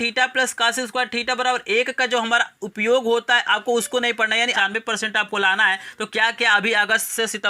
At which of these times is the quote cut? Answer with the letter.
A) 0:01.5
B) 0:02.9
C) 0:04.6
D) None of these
C